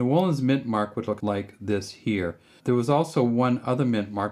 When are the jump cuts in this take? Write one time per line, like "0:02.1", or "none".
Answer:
0:01.2
0:02.5